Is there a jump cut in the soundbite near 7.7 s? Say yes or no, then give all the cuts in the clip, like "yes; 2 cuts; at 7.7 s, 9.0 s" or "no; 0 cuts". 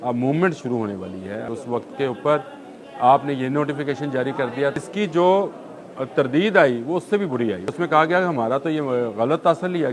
yes; 3 cuts; at 1.5 s, 4.8 s, 7.7 s